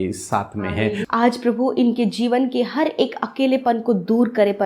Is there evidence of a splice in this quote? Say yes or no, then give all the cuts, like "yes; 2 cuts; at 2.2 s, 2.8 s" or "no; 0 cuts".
yes; 1 cut; at 1.0 s